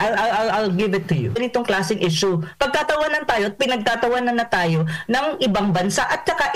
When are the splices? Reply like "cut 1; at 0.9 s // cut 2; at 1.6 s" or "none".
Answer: cut 1; at 1.4 s